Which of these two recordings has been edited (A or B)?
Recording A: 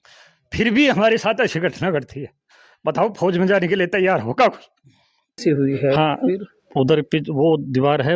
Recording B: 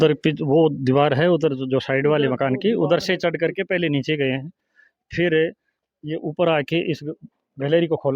A